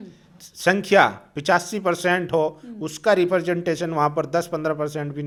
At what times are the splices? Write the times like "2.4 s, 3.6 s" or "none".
none